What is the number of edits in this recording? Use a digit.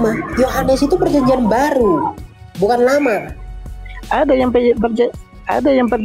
0